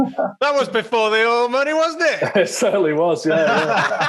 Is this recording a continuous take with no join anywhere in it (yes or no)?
yes